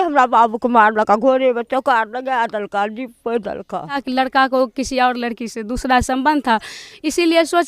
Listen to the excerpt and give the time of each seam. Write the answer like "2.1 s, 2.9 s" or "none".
4.0 s

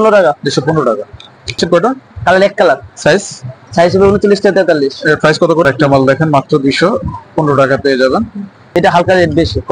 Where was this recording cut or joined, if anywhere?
1.6 s, 5.6 s, 8.8 s

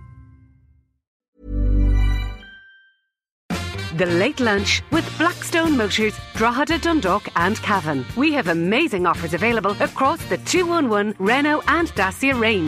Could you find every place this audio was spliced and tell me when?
1.1 s, 3.4 s

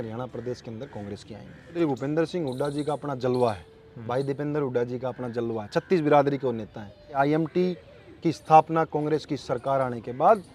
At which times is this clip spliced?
1.8 s, 7.1 s

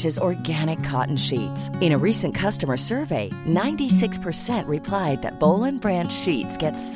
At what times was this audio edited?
none

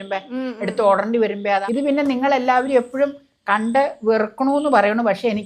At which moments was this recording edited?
1.6 s

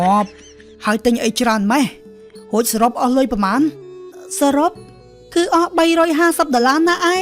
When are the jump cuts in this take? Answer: 4.1 s

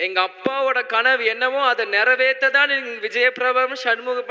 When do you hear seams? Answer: none

